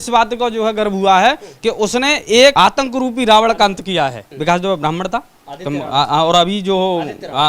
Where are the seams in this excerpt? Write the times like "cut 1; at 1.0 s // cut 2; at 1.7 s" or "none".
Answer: cut 1; at 2.5 s // cut 2; at 4.3 s